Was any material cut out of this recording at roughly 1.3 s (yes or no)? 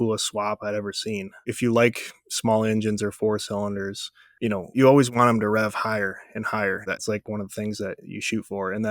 yes